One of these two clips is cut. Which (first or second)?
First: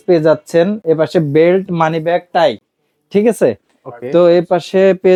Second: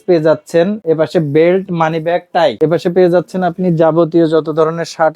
second